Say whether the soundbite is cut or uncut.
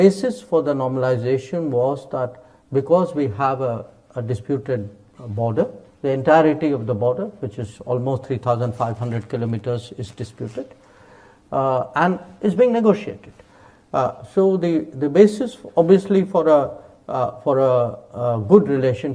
uncut